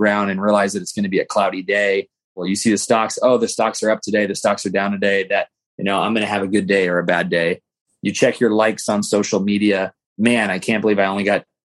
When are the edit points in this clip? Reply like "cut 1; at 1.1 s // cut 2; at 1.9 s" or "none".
cut 1; at 2.4 s // cut 2; at 10.0 s